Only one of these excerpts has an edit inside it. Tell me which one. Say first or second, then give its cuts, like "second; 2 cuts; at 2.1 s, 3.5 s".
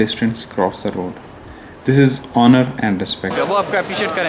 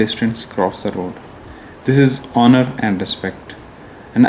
first; 1 cut; at 3.3 s